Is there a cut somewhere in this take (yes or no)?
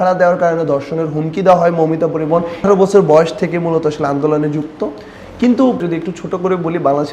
yes